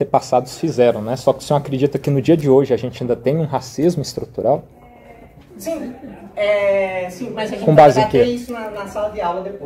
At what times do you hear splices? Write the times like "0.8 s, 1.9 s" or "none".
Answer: none